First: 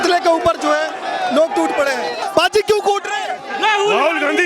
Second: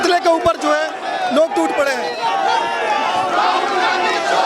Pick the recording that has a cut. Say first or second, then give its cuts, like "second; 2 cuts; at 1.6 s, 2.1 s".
first; 1 cut; at 2.2 s